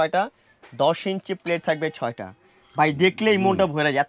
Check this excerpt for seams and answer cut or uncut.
uncut